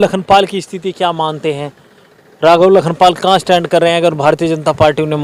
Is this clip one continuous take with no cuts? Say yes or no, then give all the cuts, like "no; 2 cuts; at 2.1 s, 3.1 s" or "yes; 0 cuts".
yes; 0 cuts